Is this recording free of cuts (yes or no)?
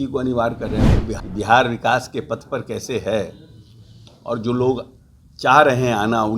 no